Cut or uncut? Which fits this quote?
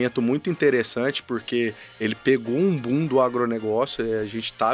uncut